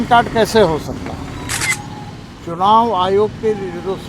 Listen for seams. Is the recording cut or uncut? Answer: cut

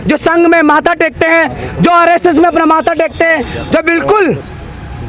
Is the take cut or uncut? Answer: uncut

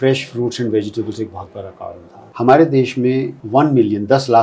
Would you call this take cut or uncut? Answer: cut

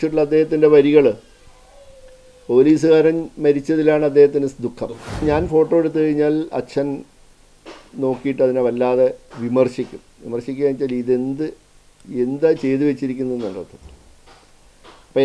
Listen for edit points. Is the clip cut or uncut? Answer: cut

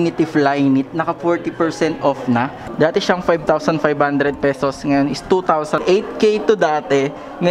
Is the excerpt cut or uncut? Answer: cut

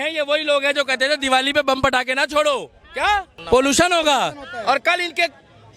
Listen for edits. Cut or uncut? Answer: cut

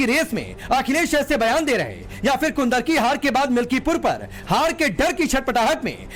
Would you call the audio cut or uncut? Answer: uncut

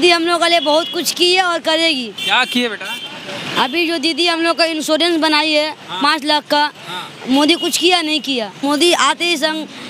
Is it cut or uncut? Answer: cut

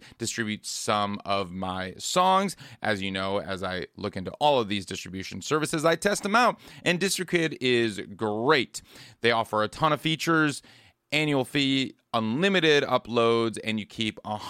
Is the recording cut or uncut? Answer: uncut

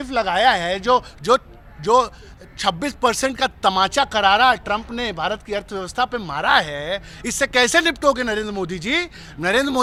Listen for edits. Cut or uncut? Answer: uncut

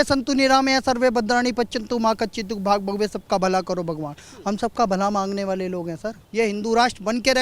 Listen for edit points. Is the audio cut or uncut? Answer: cut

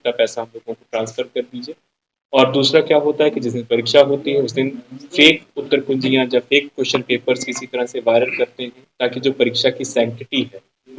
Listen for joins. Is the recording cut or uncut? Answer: uncut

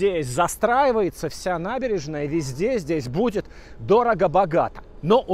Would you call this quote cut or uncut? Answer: uncut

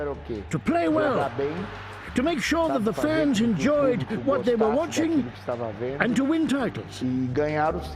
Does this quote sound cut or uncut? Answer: cut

